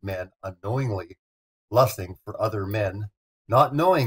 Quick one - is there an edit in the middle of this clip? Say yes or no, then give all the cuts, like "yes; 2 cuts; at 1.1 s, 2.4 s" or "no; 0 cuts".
yes; 1 cut; at 2.3 s